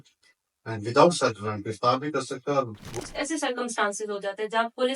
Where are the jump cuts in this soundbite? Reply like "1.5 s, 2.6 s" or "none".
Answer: 3.0 s